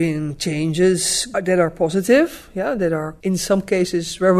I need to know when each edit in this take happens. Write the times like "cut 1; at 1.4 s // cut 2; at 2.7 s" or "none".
cut 1; at 1.3 s // cut 2; at 3.1 s